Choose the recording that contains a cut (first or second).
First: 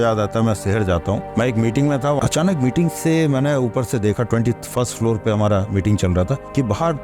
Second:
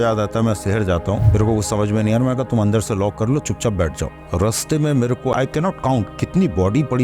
second